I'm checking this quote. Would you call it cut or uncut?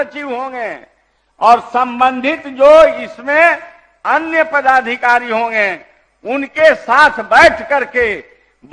uncut